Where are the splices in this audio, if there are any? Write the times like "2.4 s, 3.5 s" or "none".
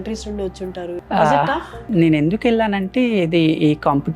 0.9 s, 1.8 s